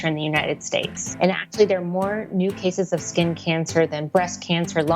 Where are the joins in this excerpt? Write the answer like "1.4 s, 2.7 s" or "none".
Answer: 0.9 s